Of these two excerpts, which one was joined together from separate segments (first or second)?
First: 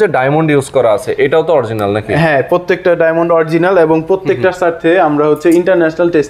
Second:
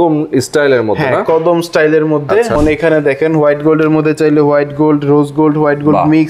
second